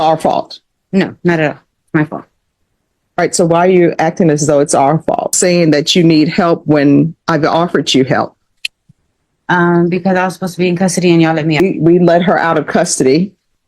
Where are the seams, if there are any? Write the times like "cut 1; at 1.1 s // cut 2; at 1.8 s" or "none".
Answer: cut 1; at 5.3 s // cut 2; at 11.6 s